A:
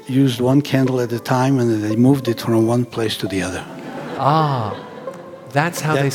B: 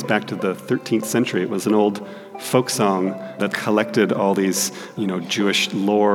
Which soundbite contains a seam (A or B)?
B